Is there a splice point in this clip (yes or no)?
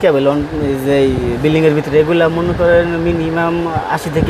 no